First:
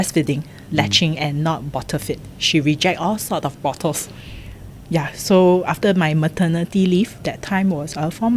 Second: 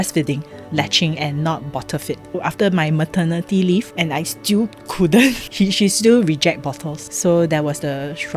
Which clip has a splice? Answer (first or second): second